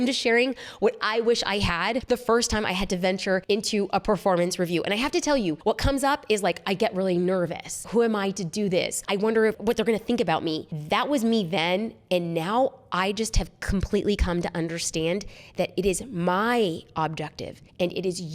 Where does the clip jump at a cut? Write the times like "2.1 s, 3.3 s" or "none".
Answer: 2.0 s, 3.4 s, 5.6 s, 7.8 s, 9.4 s